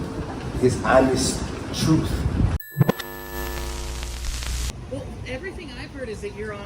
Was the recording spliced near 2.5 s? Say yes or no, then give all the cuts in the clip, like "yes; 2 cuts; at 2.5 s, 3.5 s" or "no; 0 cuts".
yes; 2 cuts; at 2.5 s, 4.5 s